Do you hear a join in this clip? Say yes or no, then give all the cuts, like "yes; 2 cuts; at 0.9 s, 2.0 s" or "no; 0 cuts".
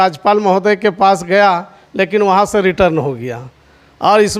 no; 0 cuts